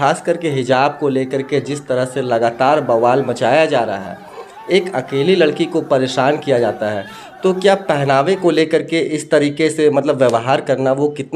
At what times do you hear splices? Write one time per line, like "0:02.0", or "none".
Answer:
none